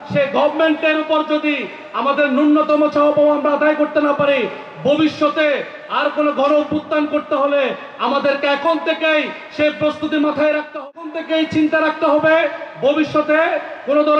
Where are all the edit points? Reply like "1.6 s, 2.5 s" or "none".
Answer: 10.8 s